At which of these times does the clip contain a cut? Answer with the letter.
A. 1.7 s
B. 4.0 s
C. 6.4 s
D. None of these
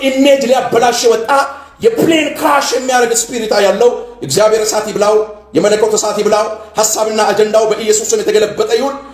D